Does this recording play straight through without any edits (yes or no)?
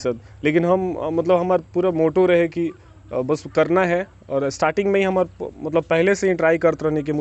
yes